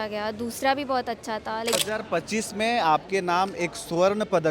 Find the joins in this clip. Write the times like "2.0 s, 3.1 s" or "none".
1.7 s